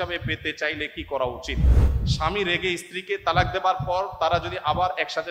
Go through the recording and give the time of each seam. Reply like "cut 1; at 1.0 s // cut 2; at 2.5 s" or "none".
cut 1; at 1.8 s